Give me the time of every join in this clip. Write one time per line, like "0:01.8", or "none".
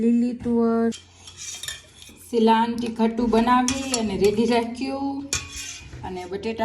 0:00.9